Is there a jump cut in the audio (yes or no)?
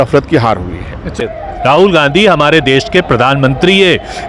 yes